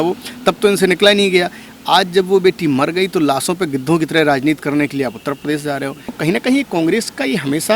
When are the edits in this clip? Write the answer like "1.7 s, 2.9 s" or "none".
6.1 s